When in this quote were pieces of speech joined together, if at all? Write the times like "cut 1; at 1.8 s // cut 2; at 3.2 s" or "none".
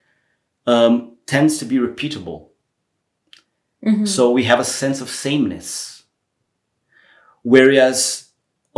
none